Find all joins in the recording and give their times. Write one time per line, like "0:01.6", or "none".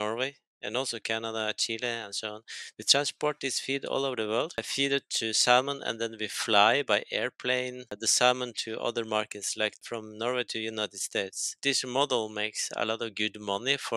0:09.8
0:11.4